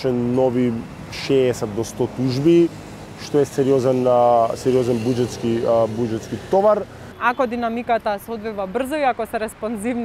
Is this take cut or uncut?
cut